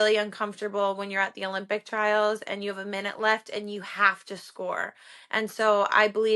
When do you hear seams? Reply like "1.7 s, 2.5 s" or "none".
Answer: none